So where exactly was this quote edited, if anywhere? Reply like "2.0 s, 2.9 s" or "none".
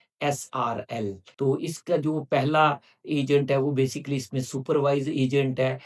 1.2 s